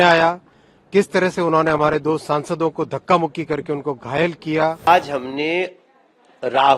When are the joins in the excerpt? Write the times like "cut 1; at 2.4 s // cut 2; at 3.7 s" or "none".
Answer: cut 1; at 4.8 s